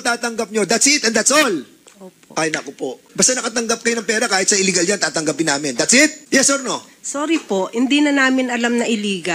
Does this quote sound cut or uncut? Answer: cut